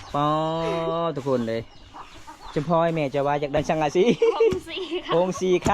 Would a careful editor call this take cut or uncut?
cut